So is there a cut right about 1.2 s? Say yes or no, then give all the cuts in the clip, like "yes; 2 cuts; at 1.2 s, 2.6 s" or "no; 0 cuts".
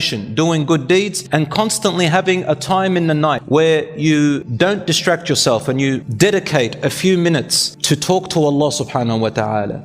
yes; 4 cuts; at 1.2 s, 3.4 s, 4.5 s, 6.1 s